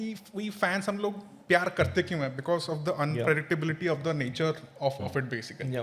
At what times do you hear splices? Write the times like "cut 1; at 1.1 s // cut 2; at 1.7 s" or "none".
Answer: none